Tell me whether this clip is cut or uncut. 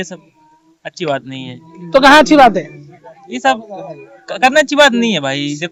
uncut